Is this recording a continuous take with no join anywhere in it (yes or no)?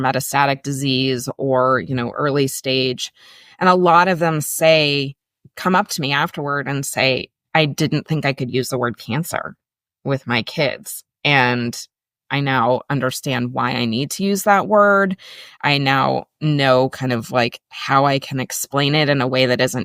yes